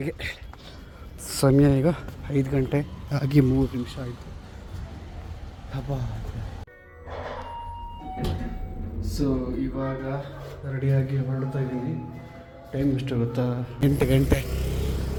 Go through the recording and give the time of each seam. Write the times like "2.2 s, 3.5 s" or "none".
none